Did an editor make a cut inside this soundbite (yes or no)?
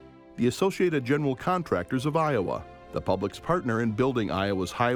no